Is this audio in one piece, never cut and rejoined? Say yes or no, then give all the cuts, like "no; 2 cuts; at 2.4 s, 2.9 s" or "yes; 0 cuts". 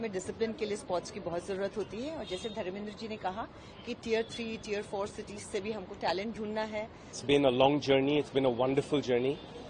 no; 1 cut; at 7.2 s